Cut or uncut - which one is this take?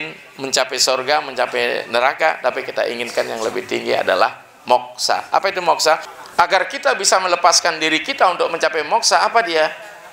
cut